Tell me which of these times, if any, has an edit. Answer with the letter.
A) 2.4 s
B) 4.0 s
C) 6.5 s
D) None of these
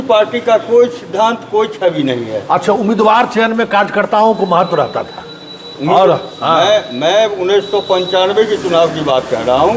D